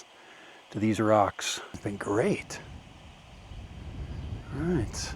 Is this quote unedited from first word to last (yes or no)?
no